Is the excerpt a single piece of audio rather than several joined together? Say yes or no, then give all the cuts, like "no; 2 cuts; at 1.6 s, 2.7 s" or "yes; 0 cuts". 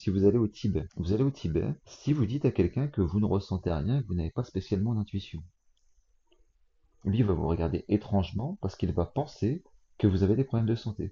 no; 2 cuts; at 0.9 s, 1.9 s